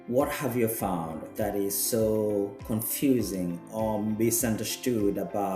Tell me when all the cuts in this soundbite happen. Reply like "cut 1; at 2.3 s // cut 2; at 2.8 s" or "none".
cut 1; at 1.2 s // cut 2; at 2.6 s